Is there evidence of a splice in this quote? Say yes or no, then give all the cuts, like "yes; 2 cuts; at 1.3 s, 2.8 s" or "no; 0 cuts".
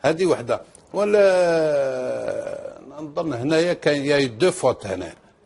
yes; 1 cut; at 4.0 s